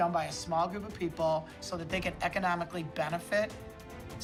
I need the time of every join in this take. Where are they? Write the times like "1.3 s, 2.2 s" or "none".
none